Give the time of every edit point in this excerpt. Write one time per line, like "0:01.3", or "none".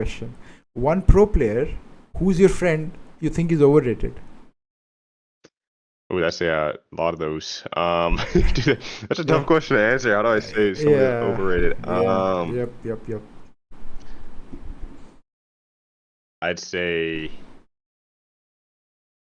none